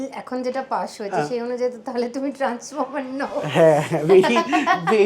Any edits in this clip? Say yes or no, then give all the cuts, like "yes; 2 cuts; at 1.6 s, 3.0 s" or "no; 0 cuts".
no; 0 cuts